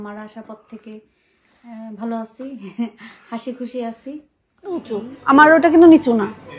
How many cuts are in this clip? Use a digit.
1